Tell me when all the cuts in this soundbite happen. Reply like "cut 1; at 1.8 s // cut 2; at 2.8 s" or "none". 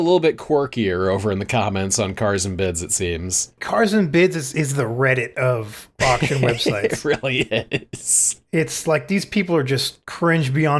cut 1; at 3.4 s // cut 2; at 4.5 s